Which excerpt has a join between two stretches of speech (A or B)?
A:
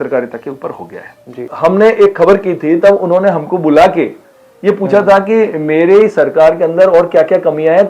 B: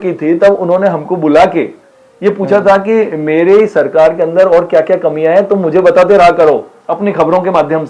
A